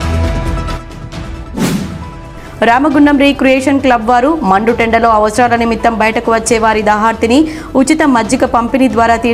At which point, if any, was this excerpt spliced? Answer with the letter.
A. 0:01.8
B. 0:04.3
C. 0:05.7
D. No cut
A